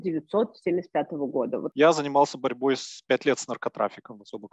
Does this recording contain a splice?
yes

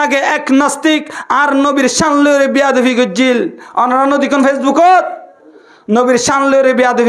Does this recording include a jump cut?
no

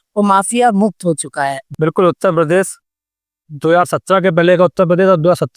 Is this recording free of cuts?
no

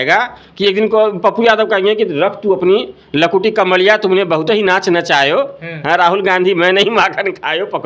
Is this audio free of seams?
yes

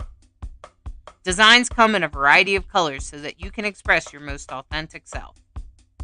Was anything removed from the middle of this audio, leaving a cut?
yes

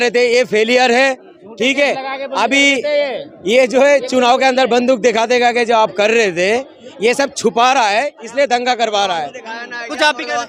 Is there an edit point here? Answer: no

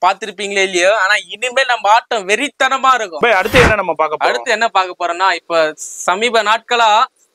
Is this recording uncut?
no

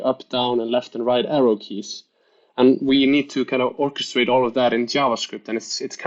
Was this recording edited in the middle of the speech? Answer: no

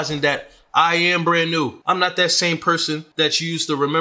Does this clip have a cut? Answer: yes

